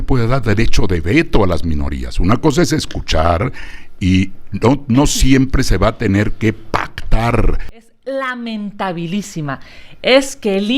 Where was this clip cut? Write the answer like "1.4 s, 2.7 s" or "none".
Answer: 7.8 s